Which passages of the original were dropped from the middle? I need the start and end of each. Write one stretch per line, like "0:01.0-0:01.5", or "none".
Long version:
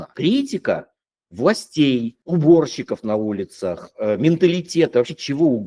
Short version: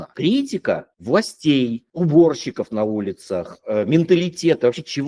0:00.9-0:01.2